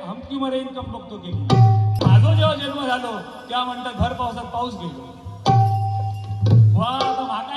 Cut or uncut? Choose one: cut